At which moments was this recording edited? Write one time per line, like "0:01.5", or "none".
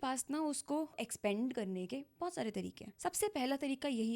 0:01.0
0:02.8